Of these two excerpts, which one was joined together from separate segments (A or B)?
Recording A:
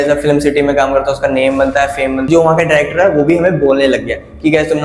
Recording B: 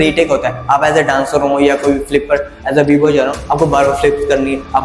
A